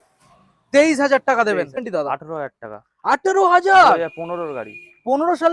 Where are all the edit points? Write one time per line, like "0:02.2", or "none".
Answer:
0:01.8